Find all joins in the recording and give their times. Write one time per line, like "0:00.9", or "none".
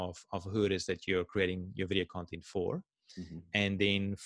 none